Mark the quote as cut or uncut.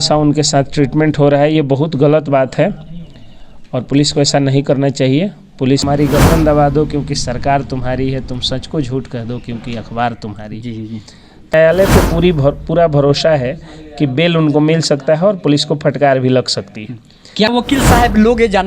cut